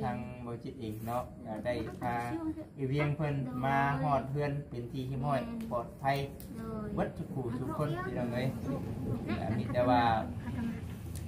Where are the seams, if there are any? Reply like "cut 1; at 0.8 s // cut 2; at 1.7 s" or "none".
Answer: none